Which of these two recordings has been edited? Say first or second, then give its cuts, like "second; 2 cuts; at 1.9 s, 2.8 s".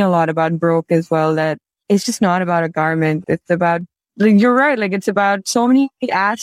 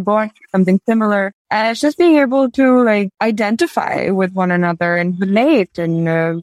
second; 2 cuts; at 1.4 s, 3.1 s